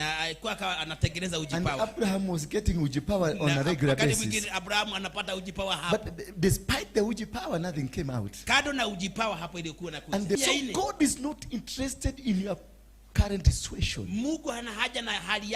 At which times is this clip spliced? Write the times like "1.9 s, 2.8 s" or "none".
10.4 s